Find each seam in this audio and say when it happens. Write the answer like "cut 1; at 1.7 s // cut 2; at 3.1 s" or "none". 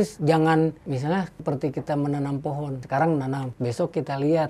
cut 1; at 1.0 s // cut 2; at 2.8 s // cut 3; at 3.5 s